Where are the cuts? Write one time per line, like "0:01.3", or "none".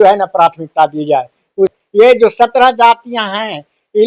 0:01.8